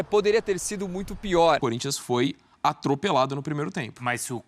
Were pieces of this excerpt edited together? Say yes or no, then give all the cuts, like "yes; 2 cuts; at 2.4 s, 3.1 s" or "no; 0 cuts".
yes; 1 cut; at 1.6 s